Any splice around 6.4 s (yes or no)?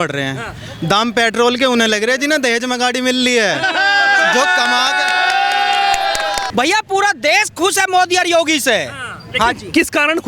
yes